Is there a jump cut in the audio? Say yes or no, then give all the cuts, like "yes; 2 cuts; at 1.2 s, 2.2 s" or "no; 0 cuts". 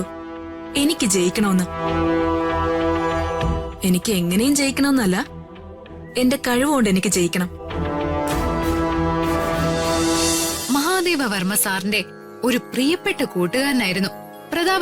yes; 1 cut; at 10.5 s